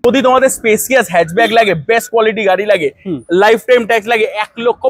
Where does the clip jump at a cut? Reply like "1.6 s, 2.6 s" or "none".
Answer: none